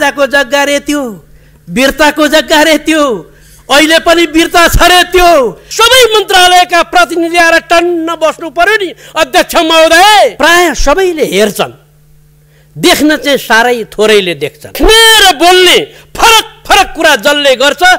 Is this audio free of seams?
no; 3 cuts; at 5.6 s, 10.3 s, 14.8 s

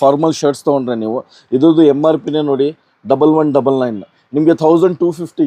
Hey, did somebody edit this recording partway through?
no; 0 cuts

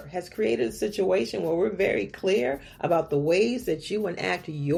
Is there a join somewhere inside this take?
no; 0 cuts

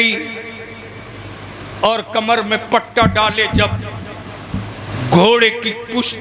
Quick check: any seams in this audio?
yes; 1 cut; at 4.9 s

